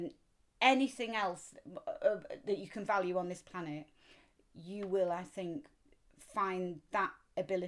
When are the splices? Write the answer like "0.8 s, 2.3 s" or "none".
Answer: none